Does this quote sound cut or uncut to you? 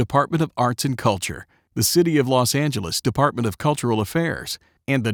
uncut